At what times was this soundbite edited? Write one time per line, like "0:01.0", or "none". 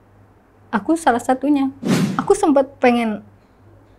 0:01.9